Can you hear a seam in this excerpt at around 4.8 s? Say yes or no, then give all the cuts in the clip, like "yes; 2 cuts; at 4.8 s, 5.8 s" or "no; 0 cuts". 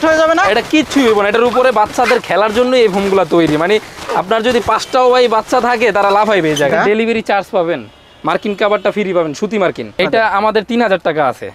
no; 2 cuts; at 6.7 s, 10.0 s